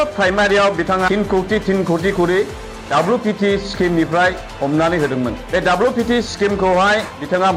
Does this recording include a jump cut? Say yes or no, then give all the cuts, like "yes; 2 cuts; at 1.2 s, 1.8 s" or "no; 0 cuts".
no; 0 cuts